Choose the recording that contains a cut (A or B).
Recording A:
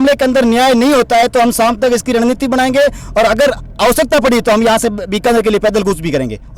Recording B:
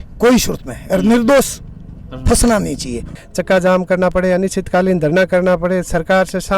B